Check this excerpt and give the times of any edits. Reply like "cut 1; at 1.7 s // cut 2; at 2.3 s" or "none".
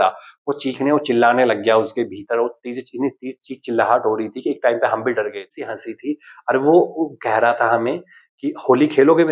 cut 1; at 5.8 s